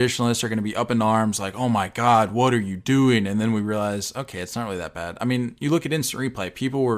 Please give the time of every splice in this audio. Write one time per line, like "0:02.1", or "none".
none